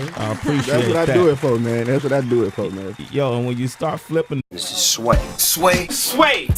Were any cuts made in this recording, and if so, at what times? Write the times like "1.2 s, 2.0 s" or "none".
none

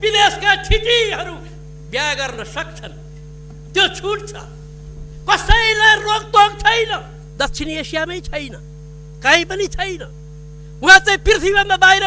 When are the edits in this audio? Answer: 7.2 s

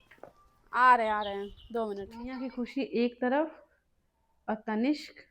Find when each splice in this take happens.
2.2 s

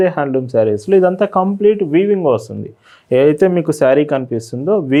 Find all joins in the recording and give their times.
none

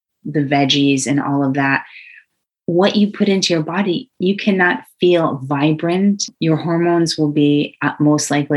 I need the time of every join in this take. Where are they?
4.1 s, 6.3 s

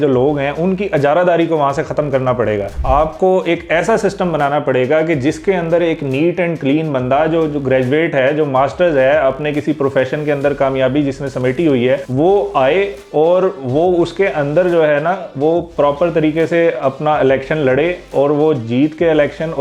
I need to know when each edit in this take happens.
none

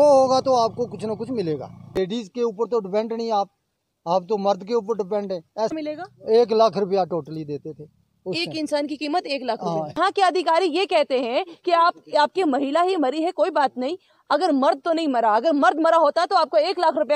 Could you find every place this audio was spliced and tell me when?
2.0 s, 5.7 s, 10.0 s

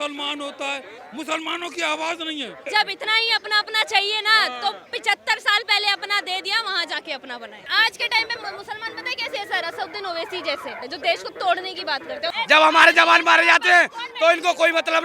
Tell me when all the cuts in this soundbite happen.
1.0 s, 2.7 s, 7.6 s, 10.8 s, 12.3 s

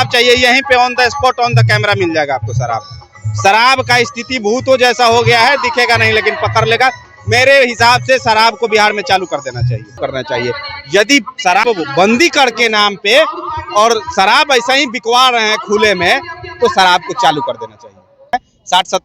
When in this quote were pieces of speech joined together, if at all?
10.0 s, 18.3 s

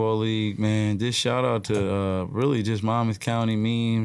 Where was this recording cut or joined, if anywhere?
none

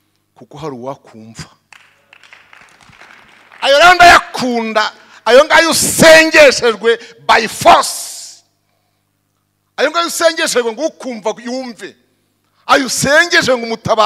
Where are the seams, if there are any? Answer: none

